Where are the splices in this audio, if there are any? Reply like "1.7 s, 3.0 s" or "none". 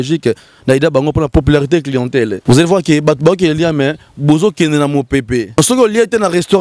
1.3 s, 2.4 s, 5.6 s